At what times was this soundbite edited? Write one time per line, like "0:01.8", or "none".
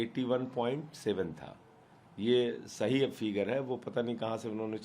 none

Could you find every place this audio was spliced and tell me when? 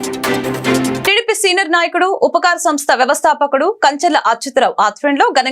0:01.0

